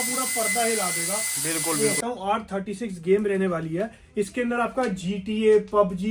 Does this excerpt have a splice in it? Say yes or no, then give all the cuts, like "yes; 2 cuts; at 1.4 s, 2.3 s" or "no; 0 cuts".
yes; 1 cut; at 2.0 s